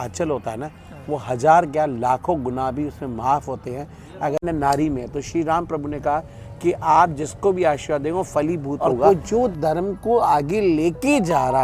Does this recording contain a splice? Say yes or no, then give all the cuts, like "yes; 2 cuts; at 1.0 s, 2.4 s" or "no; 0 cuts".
yes; 2 cuts; at 4.4 s, 9.1 s